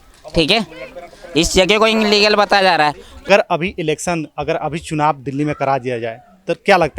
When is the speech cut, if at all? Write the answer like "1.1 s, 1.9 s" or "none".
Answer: 3.3 s